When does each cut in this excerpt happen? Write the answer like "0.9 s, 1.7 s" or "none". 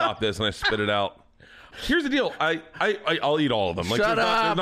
1.7 s